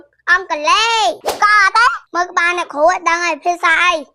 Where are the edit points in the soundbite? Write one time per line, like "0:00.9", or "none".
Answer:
0:02.0